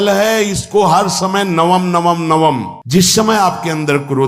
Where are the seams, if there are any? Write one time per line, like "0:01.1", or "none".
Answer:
0:02.7